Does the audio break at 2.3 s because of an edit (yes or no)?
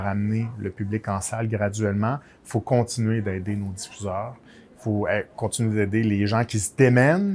no